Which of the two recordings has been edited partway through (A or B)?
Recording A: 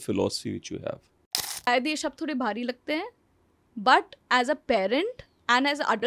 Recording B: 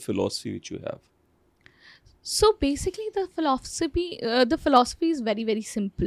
A